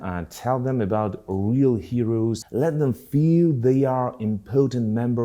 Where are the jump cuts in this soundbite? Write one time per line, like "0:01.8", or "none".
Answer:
0:02.4